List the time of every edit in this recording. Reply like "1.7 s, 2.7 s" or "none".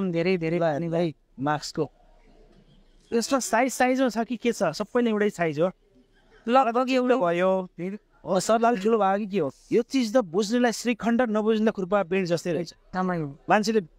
9.6 s